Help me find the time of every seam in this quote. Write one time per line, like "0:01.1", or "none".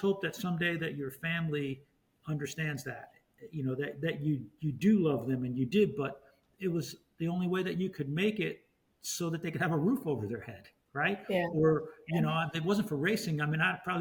none